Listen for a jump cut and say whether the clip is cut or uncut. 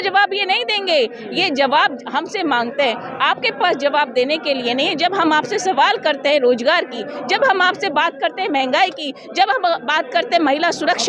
uncut